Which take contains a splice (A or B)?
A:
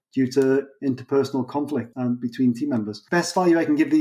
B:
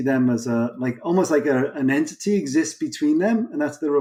A